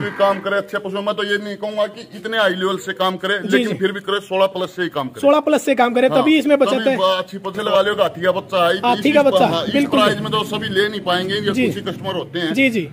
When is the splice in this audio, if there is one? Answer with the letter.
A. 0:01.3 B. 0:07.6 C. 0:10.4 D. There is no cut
B